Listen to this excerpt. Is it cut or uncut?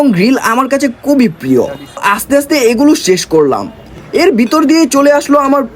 cut